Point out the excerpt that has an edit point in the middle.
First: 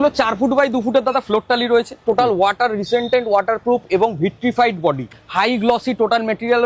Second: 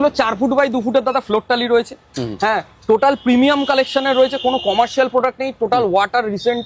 first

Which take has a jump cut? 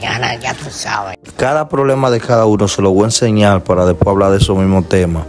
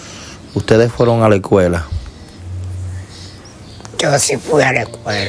first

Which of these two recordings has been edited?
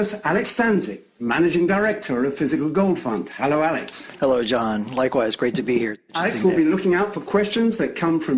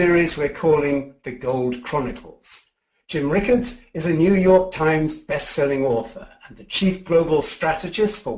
first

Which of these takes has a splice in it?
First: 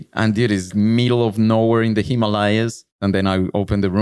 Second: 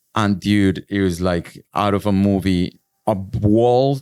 first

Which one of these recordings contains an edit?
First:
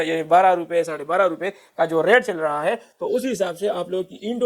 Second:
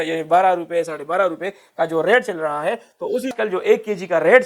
second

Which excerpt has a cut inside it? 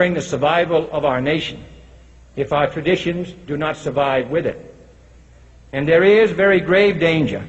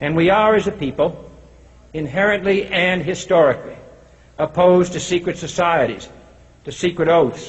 second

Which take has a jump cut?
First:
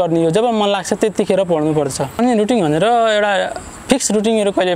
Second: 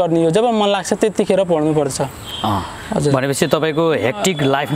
first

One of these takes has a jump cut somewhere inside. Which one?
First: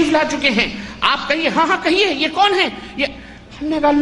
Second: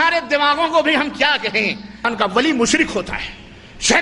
second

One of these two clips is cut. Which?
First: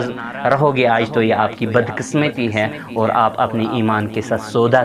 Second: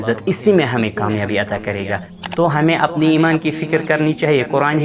second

